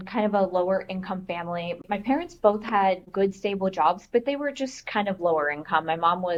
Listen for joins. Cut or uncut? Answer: uncut